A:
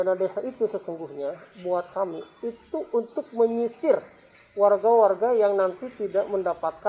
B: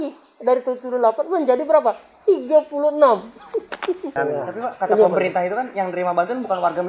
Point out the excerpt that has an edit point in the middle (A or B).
B